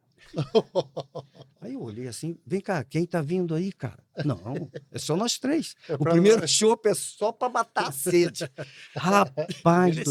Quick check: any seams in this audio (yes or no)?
no